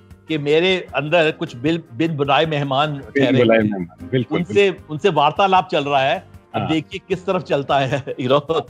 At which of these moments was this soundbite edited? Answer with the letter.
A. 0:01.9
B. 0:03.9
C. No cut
C